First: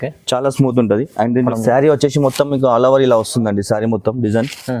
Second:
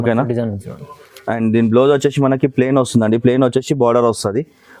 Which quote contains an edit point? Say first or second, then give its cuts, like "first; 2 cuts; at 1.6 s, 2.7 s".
first; 1 cut; at 1.5 s